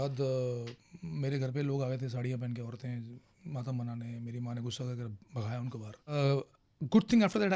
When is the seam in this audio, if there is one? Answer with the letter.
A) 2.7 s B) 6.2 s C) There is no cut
B